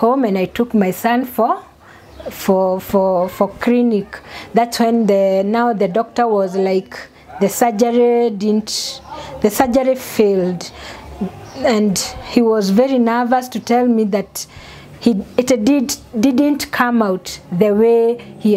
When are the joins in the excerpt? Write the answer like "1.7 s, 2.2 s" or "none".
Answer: none